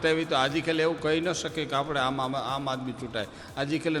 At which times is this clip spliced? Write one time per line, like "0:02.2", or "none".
none